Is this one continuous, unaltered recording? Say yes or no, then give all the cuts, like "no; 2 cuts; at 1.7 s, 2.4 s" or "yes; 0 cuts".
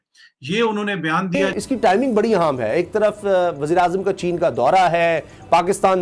no; 1 cut; at 1.5 s